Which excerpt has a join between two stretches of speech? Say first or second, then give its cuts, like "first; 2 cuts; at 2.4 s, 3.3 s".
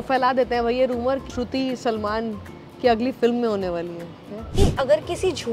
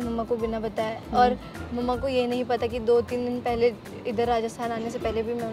first; 2 cuts; at 1.3 s, 4.5 s